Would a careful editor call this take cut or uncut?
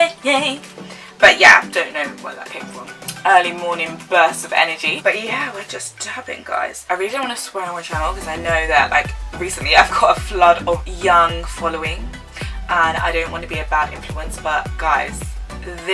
cut